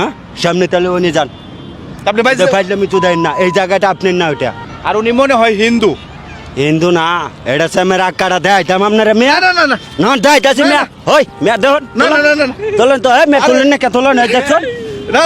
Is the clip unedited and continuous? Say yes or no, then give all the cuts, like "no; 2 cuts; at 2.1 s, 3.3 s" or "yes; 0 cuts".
no; 1 cut; at 4.6 s